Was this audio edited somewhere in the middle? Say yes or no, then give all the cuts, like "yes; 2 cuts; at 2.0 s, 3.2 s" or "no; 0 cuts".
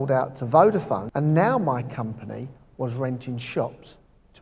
yes; 1 cut; at 1.1 s